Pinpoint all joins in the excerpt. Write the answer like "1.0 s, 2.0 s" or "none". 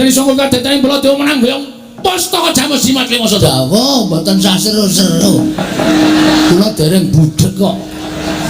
3.4 s